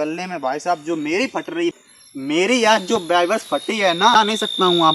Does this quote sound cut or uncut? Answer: cut